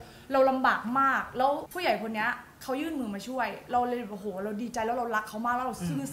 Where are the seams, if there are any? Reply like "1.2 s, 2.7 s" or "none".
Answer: 1.7 s